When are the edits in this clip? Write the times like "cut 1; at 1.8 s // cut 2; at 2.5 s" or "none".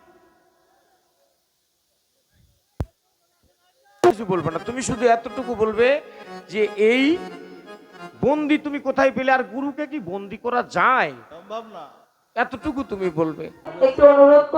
cut 1; at 4.1 s // cut 2; at 13.7 s